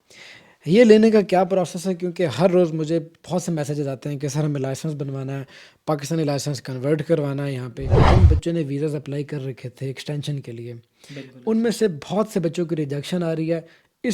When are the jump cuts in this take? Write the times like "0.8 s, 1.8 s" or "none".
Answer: 8.0 s